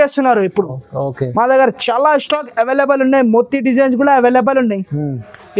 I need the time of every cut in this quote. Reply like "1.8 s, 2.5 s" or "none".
none